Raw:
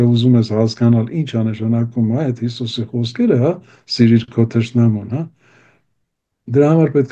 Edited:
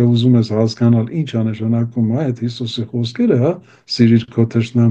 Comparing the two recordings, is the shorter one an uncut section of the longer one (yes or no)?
yes